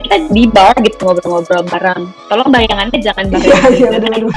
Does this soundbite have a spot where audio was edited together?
no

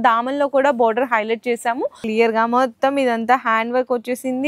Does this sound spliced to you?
yes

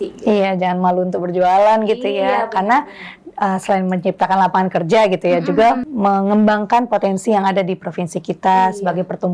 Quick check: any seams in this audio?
yes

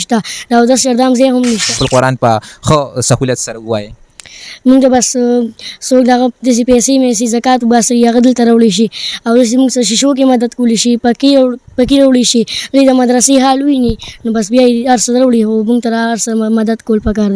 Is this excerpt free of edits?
no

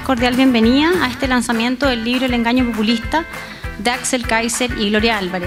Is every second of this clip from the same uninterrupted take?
yes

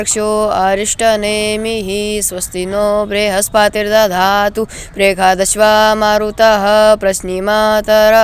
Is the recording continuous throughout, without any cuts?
yes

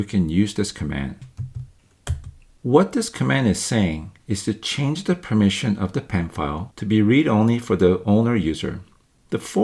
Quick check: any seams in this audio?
no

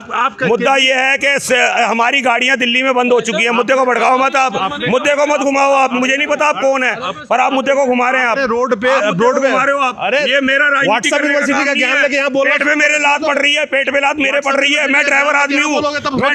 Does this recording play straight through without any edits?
yes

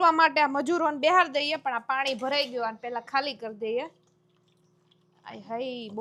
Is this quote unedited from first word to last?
yes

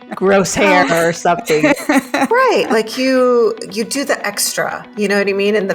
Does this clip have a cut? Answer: no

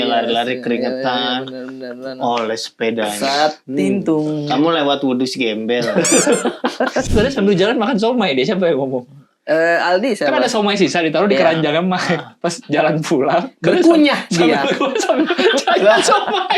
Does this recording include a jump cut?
yes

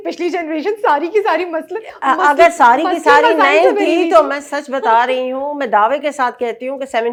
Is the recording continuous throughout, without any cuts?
yes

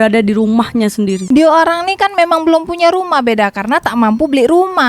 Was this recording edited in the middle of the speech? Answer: yes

